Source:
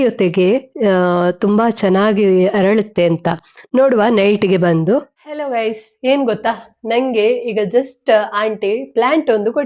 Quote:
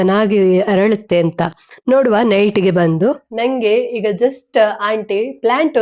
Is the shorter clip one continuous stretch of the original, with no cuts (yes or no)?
no